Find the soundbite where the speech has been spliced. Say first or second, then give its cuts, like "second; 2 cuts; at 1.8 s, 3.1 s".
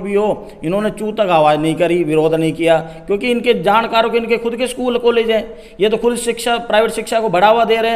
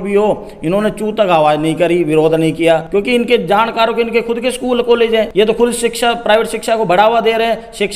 second; 2 cuts; at 2.8 s, 5.3 s